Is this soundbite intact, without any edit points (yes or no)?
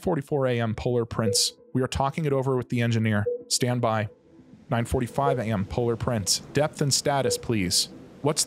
no